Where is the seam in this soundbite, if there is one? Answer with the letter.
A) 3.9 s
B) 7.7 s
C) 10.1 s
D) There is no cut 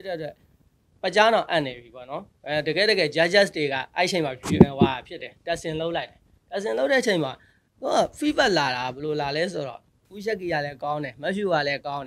C